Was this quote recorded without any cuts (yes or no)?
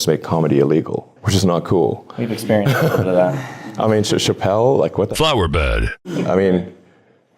no